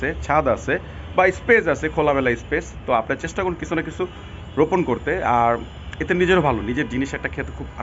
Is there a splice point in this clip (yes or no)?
no